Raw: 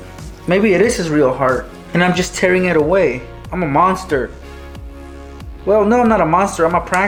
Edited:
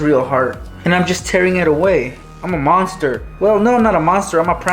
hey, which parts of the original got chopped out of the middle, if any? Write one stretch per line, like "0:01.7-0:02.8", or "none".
0:04.3-0:05.5